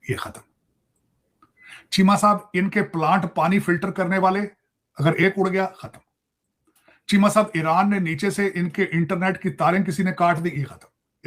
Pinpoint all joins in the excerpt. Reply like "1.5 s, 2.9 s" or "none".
none